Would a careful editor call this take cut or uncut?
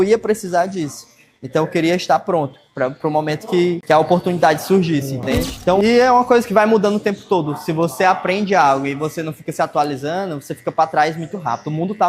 cut